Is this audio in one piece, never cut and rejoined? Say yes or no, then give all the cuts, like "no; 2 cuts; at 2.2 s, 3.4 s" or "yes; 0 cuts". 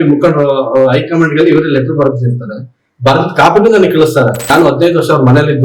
no; 1 cut; at 4.5 s